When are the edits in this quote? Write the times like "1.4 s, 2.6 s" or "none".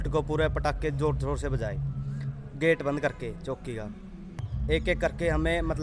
4.5 s